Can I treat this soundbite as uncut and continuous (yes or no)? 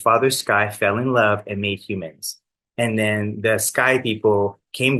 yes